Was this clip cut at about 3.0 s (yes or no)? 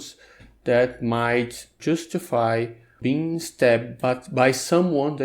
yes